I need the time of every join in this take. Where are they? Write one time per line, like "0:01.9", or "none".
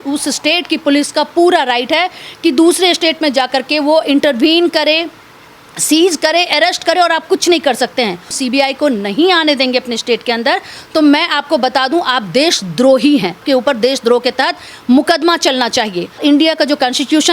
0:08.4
0:13.4
0:16.2